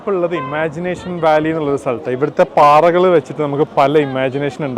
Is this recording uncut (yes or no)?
yes